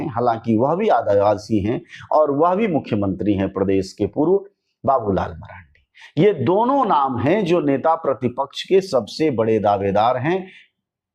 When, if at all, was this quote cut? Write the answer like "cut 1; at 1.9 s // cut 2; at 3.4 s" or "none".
none